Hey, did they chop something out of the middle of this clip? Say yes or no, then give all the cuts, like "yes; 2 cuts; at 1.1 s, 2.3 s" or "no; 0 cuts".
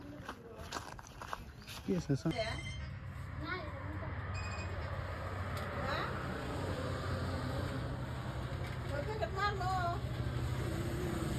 yes; 1 cut; at 1.9 s